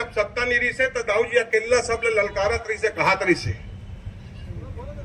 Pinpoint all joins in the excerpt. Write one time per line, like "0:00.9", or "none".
none